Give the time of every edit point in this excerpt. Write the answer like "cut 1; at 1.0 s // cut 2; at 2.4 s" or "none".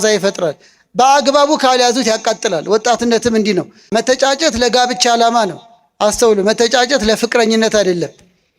cut 1; at 3.8 s